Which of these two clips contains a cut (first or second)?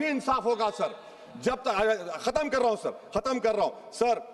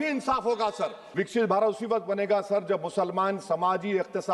second